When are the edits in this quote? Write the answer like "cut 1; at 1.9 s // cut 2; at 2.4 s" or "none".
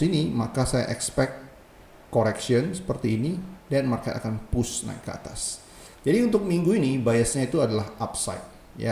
none